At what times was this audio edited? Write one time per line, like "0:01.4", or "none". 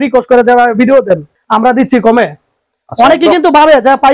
0:01.3